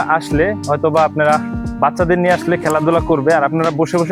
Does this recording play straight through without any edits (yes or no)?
yes